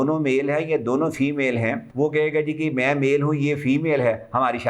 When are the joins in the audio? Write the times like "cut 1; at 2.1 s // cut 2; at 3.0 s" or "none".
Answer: cut 1; at 1.8 s